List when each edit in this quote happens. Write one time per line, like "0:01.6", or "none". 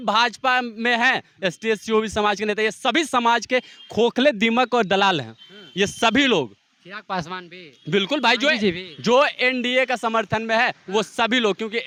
none